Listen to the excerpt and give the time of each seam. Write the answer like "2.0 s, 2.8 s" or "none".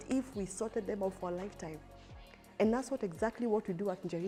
none